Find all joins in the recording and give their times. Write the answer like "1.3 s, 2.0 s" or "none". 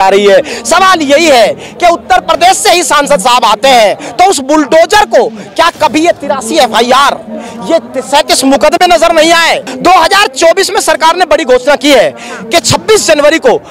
9.7 s